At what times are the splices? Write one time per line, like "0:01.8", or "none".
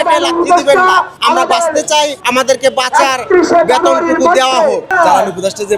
0:01.1
0:02.2
0:04.9